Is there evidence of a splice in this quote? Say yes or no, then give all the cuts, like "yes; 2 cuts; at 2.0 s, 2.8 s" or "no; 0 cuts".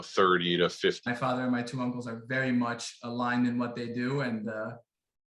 yes; 1 cut; at 1.1 s